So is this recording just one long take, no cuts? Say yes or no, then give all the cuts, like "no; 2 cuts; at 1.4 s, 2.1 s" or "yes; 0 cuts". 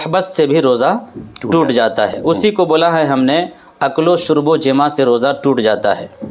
yes; 0 cuts